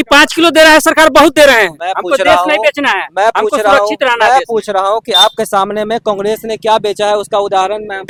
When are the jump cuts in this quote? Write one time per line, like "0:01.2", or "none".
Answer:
none